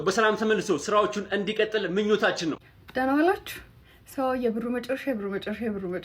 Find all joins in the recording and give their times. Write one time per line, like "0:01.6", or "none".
0:02.5